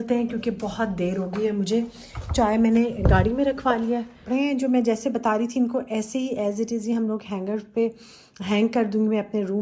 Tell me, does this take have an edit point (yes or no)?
yes